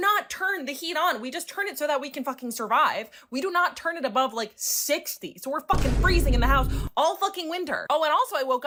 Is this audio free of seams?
yes; 0 cuts

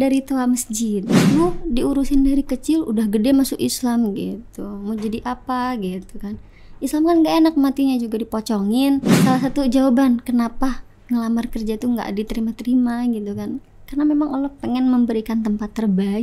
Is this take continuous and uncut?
no; 2 cuts; at 1.1 s, 9.1 s

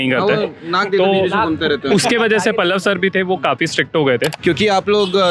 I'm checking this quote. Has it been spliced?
yes; 1 cut; at 4.4 s

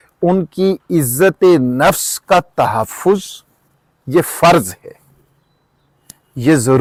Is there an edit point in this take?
no; 0 cuts

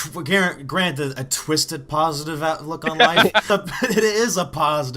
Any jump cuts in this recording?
yes; 1 cut; at 3.5 s

